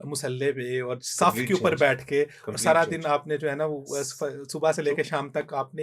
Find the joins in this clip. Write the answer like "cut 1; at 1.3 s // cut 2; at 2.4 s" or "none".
none